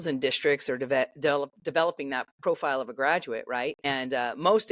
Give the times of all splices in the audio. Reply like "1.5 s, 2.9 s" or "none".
3.8 s